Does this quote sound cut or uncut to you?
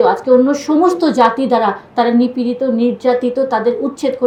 uncut